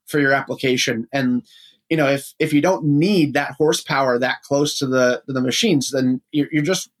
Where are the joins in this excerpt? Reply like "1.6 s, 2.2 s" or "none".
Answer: none